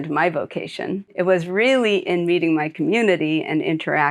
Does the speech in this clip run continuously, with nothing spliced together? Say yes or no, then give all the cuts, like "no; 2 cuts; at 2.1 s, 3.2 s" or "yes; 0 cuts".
no; 1 cut; at 1.1 s